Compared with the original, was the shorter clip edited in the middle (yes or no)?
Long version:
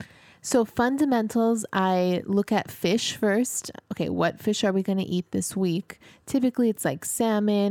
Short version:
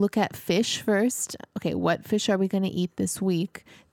no